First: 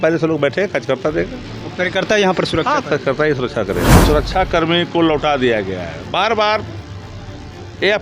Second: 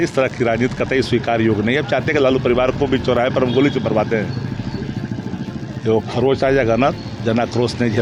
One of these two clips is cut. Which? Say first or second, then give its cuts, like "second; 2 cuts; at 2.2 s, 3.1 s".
first; 1 cut; at 4.0 s